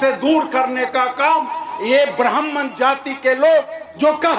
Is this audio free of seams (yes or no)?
yes